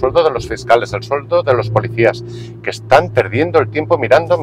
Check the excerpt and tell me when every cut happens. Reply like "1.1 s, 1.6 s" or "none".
none